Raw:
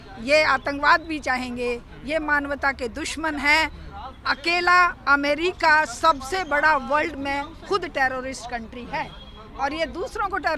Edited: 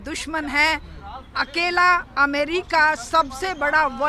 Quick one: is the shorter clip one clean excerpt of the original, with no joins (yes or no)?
yes